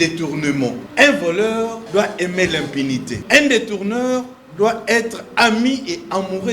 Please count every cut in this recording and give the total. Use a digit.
3